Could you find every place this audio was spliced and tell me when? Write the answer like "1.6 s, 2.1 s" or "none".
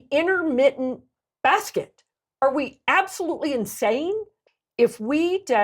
4.4 s